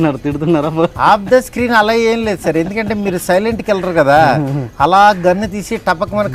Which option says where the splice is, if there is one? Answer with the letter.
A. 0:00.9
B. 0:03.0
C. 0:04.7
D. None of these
A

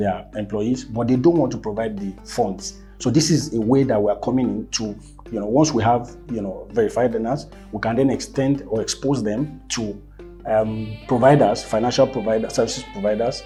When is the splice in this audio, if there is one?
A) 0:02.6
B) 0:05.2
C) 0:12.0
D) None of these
D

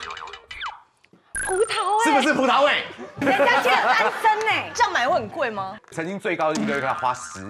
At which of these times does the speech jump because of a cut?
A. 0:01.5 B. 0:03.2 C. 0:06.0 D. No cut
B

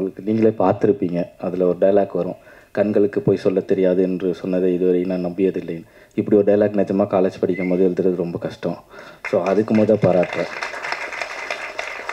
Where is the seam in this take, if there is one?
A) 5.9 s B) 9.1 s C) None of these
C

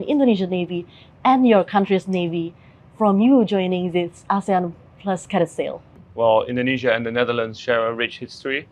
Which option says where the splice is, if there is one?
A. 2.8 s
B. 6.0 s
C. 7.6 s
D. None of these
B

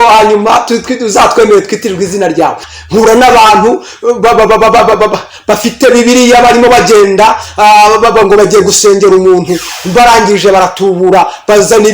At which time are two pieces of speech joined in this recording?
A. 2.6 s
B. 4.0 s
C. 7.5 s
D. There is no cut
A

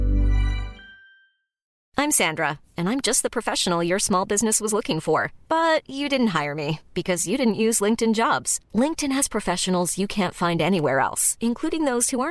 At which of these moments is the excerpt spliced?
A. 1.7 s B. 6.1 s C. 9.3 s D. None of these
A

